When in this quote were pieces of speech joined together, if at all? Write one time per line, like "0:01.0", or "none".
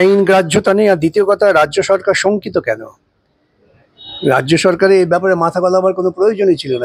none